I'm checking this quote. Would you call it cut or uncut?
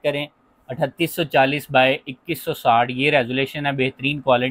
uncut